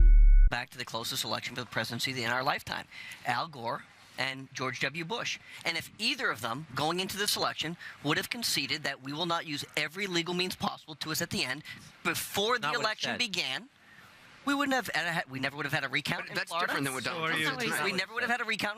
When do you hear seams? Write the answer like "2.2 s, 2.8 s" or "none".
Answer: 15.3 s